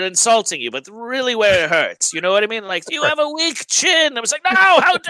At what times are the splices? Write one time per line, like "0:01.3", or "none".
none